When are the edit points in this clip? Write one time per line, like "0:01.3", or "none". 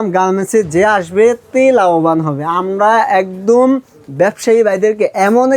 none